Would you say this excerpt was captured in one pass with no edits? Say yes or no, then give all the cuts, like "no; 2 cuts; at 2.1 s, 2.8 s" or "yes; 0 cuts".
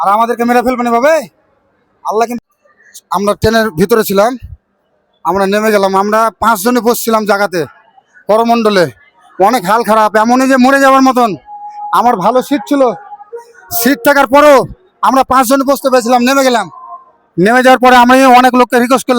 no; 1 cut; at 2.4 s